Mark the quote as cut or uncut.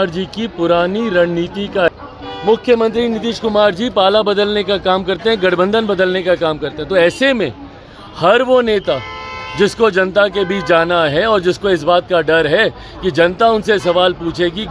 cut